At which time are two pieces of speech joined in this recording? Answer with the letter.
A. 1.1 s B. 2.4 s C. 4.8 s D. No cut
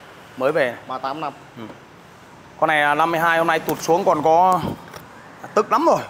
D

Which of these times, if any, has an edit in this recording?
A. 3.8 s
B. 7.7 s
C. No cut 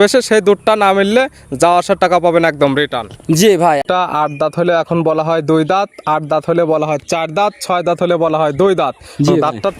A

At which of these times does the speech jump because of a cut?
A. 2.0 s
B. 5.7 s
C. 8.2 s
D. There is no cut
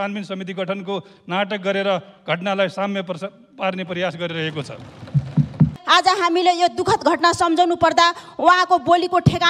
B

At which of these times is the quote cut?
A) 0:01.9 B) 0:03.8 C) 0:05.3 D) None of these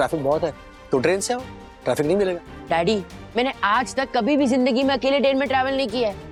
D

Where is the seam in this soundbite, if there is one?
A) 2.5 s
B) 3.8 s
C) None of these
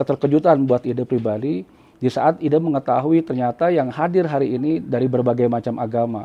C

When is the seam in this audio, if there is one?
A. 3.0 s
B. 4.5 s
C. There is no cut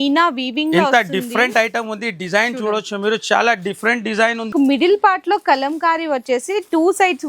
B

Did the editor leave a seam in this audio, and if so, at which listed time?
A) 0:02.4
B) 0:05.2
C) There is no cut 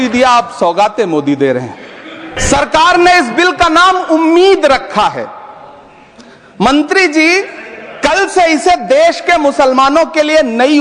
A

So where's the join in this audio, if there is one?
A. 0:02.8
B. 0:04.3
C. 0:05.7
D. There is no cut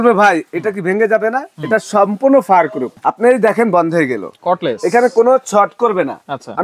A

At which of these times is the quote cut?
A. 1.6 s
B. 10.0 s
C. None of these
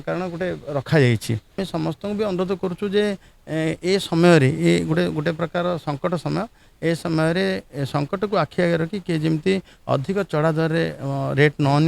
A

